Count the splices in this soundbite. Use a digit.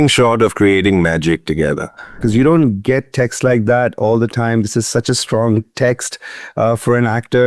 1